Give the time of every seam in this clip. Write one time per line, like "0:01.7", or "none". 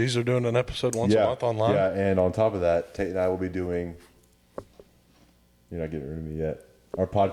none